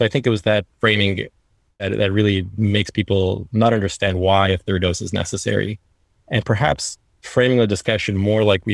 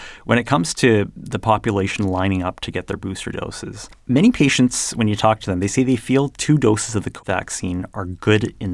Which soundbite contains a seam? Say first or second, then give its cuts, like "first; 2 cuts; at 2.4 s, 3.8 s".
second; 1 cut; at 3.9 s